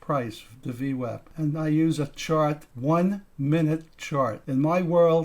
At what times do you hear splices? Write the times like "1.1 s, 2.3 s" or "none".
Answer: 1.3 s, 2.7 s, 4.4 s